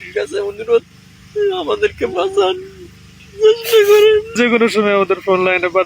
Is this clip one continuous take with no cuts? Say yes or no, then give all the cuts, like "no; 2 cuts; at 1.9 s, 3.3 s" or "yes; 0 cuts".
no; 1 cut; at 4.4 s